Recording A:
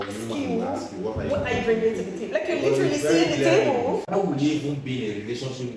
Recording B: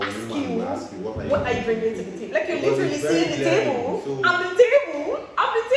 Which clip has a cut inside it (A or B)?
A